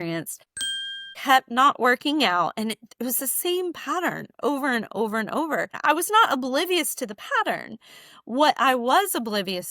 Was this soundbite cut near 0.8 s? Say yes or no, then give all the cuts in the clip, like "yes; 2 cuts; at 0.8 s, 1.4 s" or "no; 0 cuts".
yes; 2 cuts; at 0.8 s, 5.7 s